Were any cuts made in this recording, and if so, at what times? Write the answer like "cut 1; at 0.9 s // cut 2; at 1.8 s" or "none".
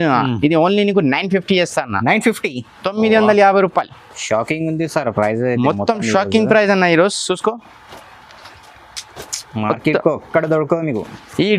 none